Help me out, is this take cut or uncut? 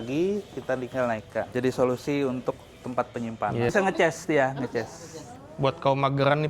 cut